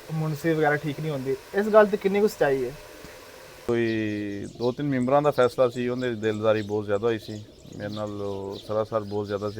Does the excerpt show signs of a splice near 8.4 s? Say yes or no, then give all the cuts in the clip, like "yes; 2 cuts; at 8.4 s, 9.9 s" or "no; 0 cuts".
no; 1 cut; at 3.7 s